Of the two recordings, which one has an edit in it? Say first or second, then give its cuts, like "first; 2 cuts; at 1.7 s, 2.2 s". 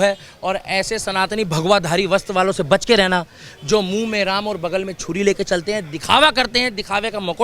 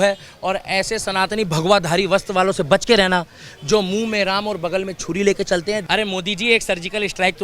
second; 1 cut; at 5.8 s